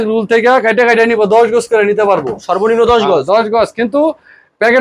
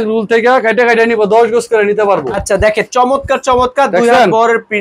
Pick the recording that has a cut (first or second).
second